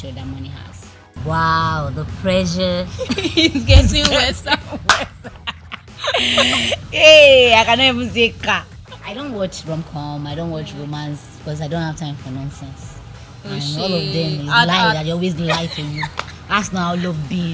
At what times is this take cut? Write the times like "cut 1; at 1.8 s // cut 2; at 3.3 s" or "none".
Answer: cut 1; at 1.2 s // cut 2; at 8.7 s